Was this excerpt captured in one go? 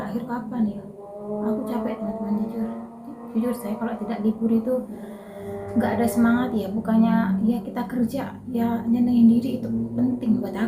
yes; 0 cuts

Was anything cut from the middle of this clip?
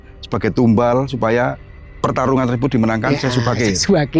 no; 0 cuts

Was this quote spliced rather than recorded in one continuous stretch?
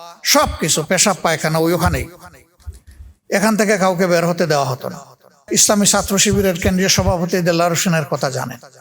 yes; 1 cut; at 5.4 s

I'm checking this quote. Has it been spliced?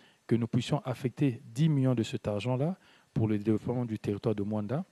no; 0 cuts

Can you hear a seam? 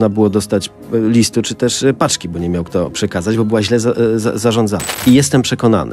yes; 1 cut; at 4.9 s

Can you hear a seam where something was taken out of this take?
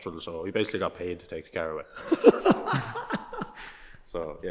no; 0 cuts

